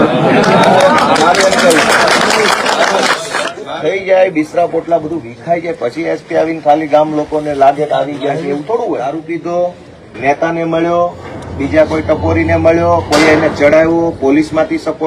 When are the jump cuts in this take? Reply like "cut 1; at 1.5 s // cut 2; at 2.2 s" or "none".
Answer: cut 1; at 3.6 s // cut 2; at 9.2 s